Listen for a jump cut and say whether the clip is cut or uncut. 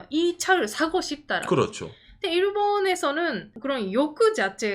cut